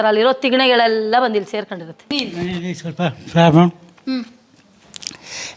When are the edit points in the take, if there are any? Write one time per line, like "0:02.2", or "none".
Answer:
0:02.2